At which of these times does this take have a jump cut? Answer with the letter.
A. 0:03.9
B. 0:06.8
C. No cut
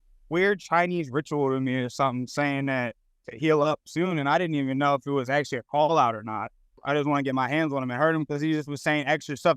B